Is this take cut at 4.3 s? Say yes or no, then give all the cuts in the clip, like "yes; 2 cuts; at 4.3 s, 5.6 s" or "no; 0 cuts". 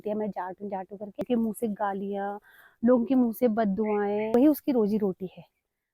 yes; 2 cuts; at 1.2 s, 4.3 s